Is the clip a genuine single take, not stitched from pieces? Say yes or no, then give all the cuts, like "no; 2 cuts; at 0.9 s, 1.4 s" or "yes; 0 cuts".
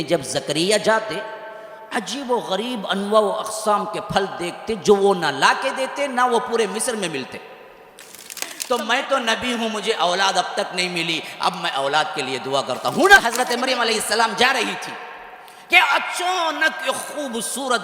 no; 2 cuts; at 8.5 s, 13.2 s